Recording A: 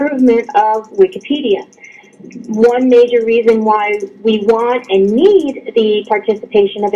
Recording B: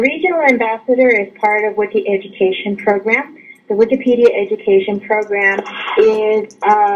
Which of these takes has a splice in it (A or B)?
A